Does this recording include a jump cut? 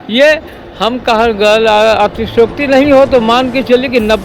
no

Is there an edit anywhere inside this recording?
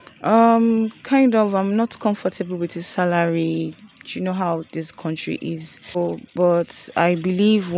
yes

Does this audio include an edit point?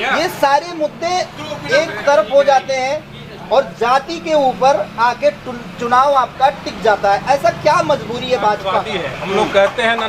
yes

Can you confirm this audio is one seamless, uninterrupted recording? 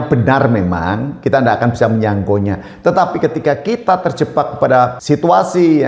no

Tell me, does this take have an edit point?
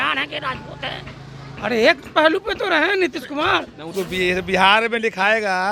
yes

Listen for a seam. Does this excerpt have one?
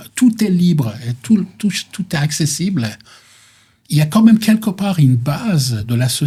no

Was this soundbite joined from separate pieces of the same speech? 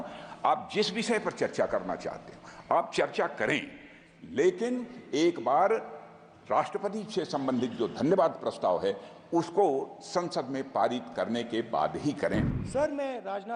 yes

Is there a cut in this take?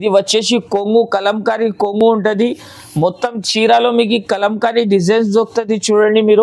no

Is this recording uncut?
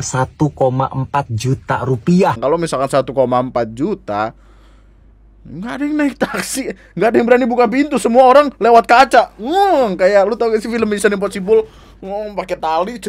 no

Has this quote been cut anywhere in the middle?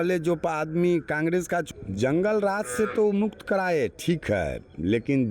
yes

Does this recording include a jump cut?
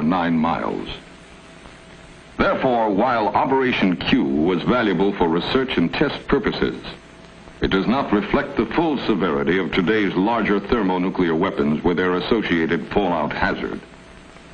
no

